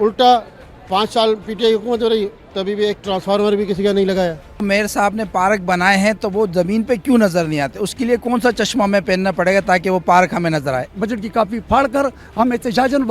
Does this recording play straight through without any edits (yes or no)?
no